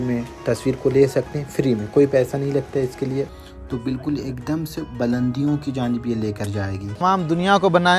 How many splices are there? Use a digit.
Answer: 2